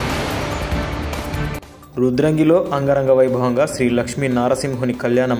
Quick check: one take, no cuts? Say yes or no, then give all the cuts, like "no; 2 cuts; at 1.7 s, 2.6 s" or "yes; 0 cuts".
yes; 0 cuts